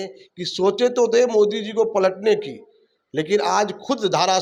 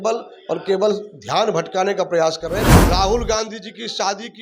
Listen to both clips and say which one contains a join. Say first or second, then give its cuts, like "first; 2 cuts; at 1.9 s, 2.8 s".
second; 1 cut; at 2.7 s